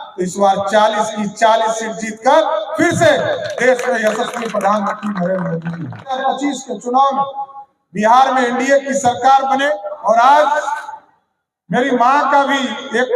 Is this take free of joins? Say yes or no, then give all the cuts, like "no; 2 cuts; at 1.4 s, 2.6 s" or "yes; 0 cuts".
no; 2 cuts; at 6.2 s, 9.9 s